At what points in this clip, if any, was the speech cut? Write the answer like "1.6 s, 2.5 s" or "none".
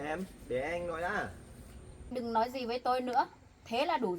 2.1 s